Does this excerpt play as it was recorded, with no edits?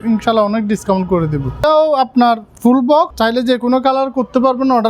no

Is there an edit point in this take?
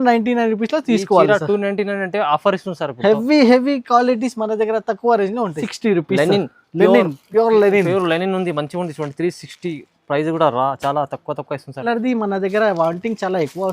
yes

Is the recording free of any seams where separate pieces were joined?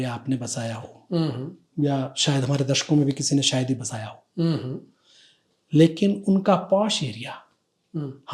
yes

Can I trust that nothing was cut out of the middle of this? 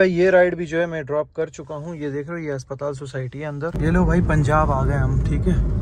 no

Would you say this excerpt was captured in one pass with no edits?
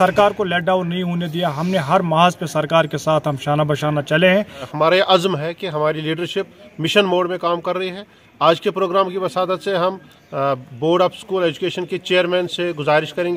no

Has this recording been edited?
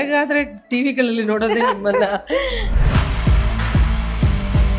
yes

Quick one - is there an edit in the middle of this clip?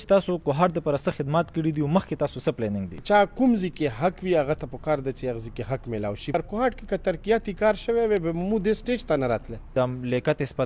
yes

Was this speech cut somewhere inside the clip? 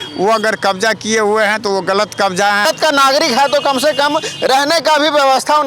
yes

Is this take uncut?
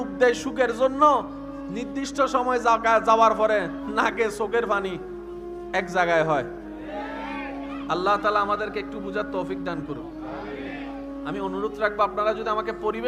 yes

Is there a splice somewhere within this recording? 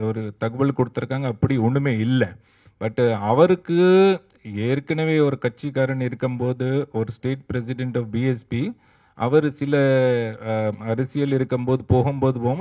no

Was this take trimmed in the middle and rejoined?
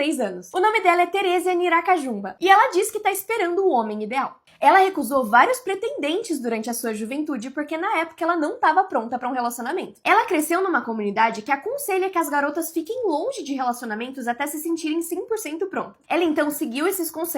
no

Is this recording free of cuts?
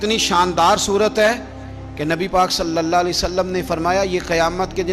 yes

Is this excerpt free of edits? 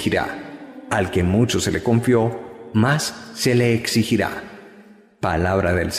yes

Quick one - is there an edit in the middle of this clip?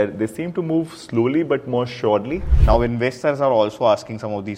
yes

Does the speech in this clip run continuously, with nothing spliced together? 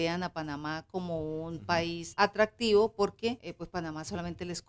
no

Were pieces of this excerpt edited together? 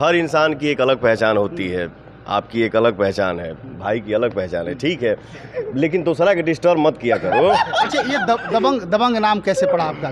no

